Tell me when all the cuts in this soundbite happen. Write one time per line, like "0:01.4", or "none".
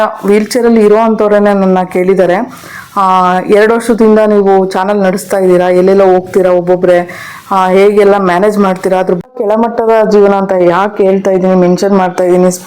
0:09.2